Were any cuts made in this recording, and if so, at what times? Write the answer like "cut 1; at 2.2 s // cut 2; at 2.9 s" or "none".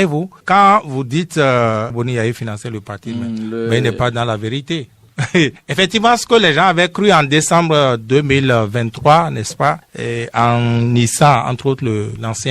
cut 1; at 1.9 s